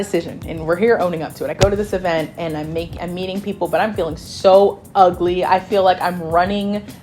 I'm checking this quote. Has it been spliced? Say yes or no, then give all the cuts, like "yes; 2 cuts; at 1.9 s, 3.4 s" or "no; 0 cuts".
no; 0 cuts